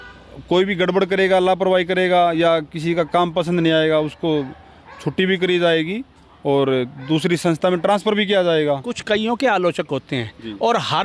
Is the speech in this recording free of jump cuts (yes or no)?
yes